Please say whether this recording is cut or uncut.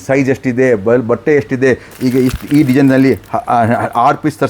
cut